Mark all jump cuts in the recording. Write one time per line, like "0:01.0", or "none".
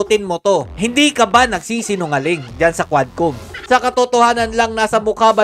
0:03.6